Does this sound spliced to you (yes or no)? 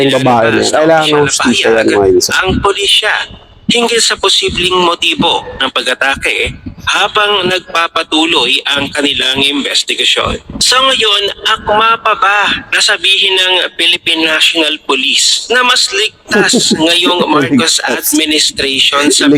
no